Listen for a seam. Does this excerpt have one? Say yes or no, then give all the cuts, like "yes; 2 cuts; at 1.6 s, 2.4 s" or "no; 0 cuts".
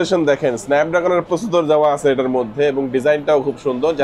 no; 0 cuts